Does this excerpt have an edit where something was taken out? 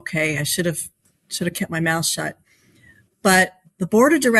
no; 0 cuts

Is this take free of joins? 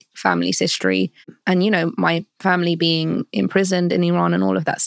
yes; 0 cuts

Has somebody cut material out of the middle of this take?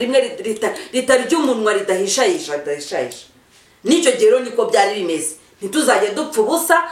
no; 0 cuts

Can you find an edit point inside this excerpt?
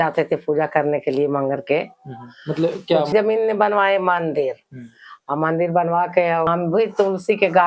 yes; 2 cuts; at 3.1 s, 6.5 s

